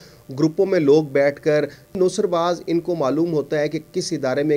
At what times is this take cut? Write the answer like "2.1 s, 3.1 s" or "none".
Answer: 2.0 s